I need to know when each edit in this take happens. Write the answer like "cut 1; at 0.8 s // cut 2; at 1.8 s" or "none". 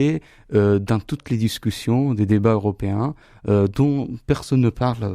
none